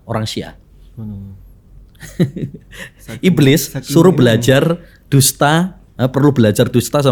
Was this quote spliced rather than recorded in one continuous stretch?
no; 0 cuts

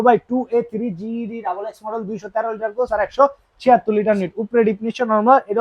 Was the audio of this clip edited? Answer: no; 0 cuts

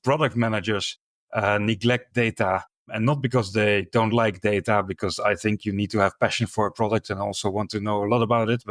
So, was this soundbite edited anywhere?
yes; 1 cut; at 2.9 s

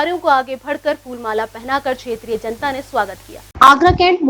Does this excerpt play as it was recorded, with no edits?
yes; 0 cuts

